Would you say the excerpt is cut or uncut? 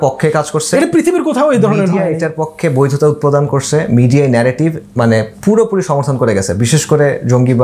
uncut